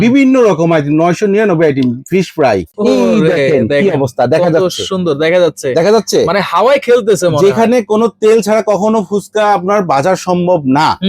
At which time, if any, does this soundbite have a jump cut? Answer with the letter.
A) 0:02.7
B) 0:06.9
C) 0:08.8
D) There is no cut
A